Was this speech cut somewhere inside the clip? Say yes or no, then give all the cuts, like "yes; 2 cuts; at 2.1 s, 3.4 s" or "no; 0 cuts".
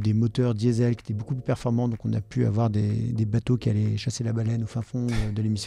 no; 0 cuts